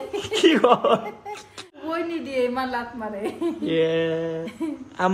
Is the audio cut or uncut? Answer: cut